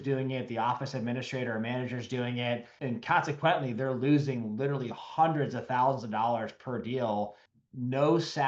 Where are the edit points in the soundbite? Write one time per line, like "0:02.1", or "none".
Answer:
0:02.7
0:07.4